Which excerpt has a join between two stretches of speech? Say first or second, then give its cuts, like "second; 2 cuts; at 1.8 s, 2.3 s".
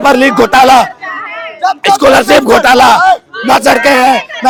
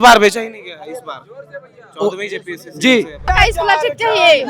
second; 1 cut; at 3.3 s